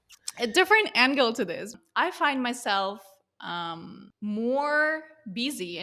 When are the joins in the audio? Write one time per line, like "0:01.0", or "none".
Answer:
0:01.7
0:04.0